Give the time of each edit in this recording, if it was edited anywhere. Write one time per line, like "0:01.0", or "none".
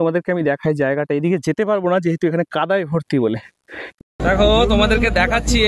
0:03.9